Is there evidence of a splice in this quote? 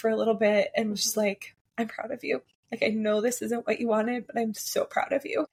no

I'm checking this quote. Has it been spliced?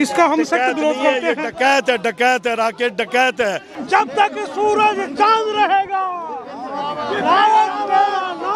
yes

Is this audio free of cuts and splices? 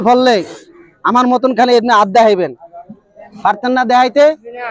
yes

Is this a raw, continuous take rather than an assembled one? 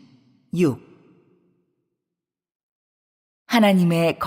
yes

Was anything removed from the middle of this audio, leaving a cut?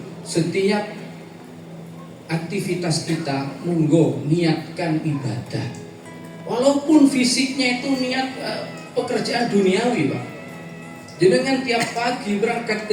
no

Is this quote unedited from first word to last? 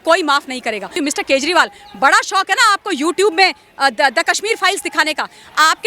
no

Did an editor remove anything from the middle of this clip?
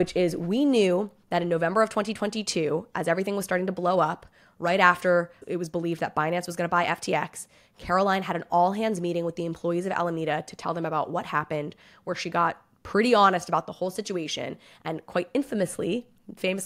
no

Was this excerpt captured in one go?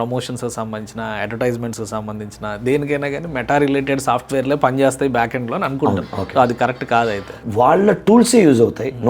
no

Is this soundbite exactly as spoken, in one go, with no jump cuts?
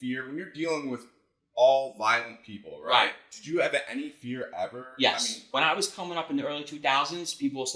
yes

